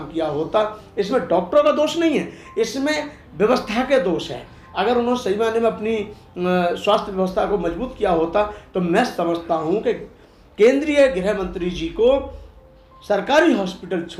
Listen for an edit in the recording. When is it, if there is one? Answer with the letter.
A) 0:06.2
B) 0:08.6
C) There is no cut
C